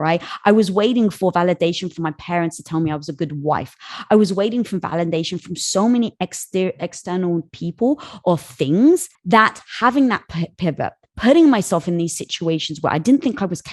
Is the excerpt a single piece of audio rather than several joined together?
no; 1 cut; at 9.1 s

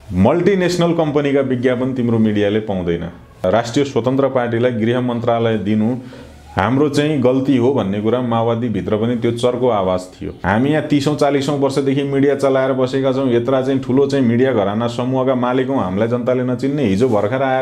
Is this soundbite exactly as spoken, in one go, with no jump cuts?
no; 2 cuts; at 3.2 s, 10.4 s

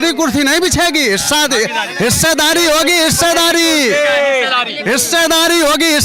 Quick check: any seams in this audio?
no; 0 cuts

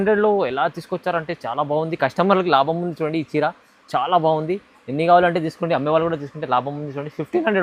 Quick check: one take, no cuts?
yes; 0 cuts

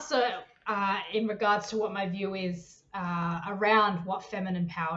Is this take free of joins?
yes; 0 cuts

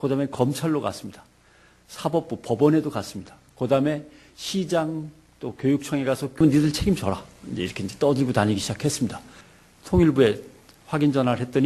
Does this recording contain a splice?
yes; 1 cut; at 10.5 s

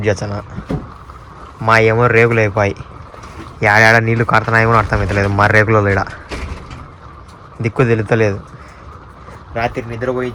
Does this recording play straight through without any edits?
yes; 0 cuts

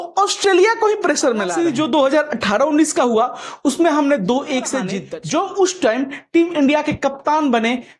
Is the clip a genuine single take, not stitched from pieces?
no; 2 cuts; at 1.5 s, 5.0 s

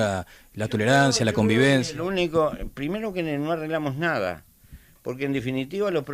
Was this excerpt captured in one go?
no; 1 cut; at 2.0 s

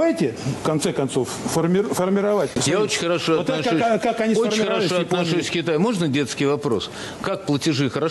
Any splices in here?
no; 0 cuts

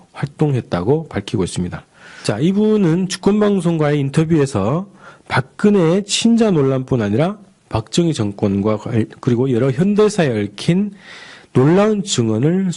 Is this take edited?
no; 0 cuts

